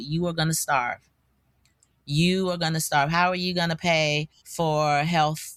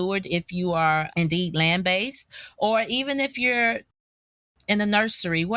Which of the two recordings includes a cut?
second; 1 cut; at 4.0 s

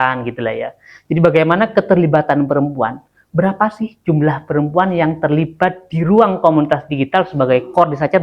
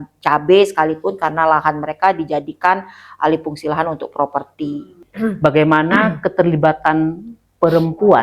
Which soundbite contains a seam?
second; 1 cut; at 5.0 s

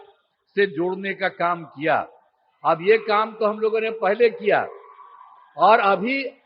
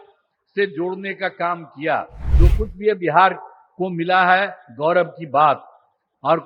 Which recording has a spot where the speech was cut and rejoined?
second; 1 cut; at 2.3 s

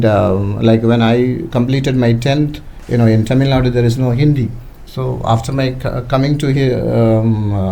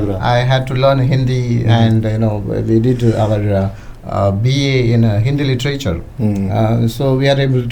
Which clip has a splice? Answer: first; 1 cut; at 2.7 s

